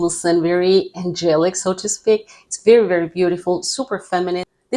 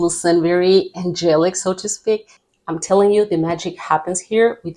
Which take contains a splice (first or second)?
second